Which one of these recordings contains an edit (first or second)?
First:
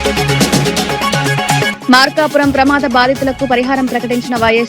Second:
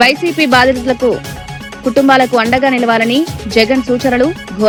first